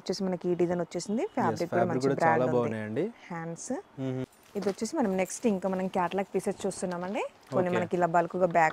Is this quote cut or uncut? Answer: cut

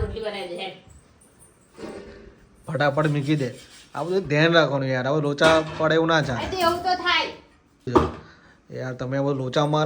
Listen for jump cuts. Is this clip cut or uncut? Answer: cut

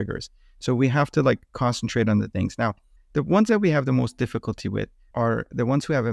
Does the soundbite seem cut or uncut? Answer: cut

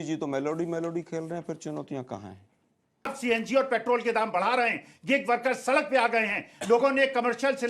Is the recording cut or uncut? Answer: cut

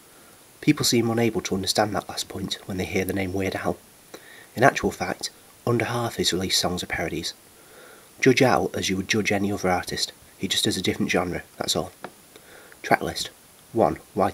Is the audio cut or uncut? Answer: cut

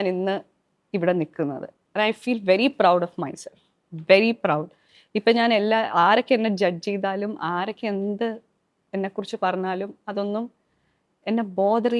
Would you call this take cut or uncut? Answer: uncut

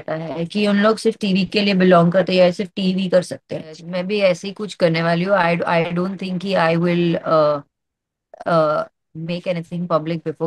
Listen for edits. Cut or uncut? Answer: cut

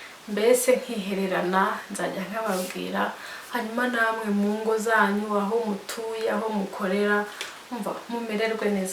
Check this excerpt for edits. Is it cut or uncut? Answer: uncut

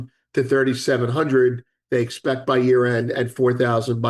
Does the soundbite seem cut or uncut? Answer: uncut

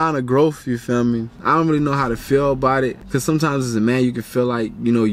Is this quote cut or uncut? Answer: cut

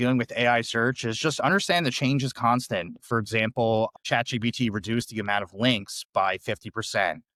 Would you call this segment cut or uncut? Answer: uncut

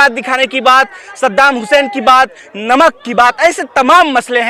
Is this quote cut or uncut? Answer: uncut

